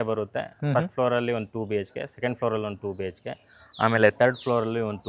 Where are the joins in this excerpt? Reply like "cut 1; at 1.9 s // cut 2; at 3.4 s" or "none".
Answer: none